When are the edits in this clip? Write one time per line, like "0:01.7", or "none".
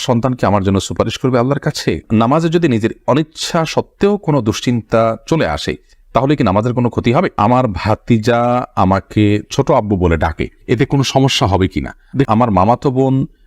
0:02.0
0:07.3
0:12.3